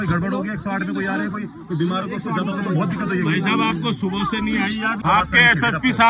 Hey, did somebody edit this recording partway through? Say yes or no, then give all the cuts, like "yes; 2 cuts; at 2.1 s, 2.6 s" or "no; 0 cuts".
yes; 1 cut; at 5.0 s